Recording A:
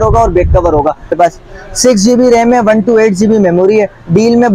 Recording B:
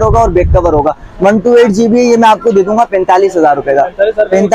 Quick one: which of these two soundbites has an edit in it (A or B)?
A